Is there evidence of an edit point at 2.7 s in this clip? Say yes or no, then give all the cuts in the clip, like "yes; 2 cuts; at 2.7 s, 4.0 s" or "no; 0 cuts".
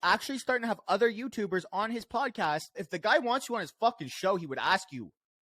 yes; 1 cut; at 2.7 s